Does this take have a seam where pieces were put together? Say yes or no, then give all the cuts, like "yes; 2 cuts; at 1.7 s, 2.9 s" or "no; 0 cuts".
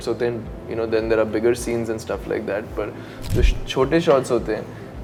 no; 0 cuts